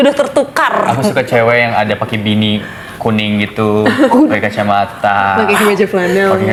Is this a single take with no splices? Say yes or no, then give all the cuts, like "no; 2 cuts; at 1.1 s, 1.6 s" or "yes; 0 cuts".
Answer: yes; 0 cuts